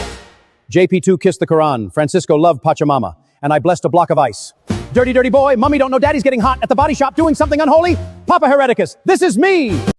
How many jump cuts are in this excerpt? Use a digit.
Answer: 0